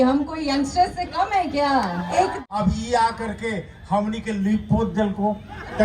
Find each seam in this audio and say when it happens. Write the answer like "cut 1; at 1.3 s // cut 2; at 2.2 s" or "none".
cut 1; at 2.3 s